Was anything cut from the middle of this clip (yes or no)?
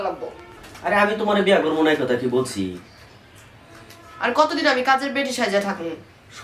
no